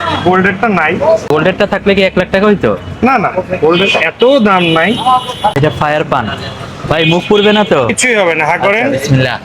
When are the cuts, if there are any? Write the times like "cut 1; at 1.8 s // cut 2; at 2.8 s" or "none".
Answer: cut 1; at 1.3 s // cut 2; at 5.5 s